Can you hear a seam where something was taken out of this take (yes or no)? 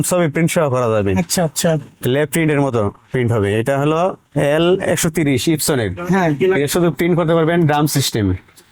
no